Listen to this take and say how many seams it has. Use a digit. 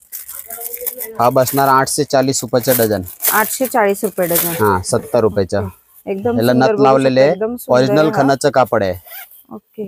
0